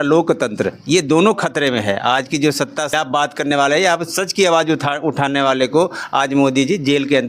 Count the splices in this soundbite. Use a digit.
1